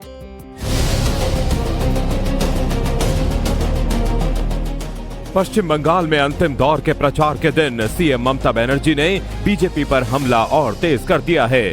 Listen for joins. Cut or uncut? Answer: cut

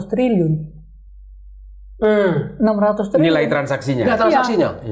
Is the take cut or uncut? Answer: uncut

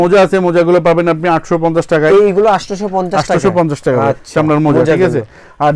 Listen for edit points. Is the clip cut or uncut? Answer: uncut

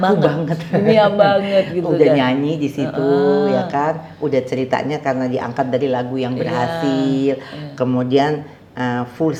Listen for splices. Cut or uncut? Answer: uncut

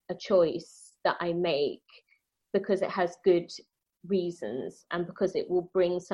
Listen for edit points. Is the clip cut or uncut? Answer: uncut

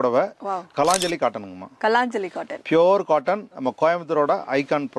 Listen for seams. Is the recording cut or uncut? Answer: uncut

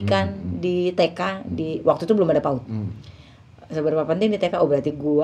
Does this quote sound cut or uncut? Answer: uncut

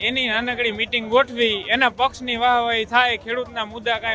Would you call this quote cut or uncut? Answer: uncut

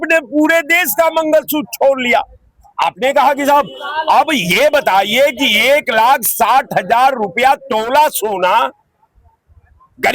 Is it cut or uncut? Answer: uncut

